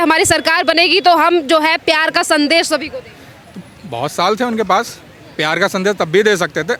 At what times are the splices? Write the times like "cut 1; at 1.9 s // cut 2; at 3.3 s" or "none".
none